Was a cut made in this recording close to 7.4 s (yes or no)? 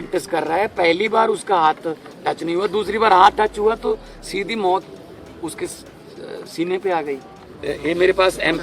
yes